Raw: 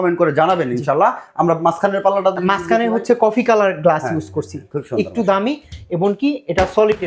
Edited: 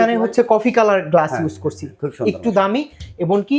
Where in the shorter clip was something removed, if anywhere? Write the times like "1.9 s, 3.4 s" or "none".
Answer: none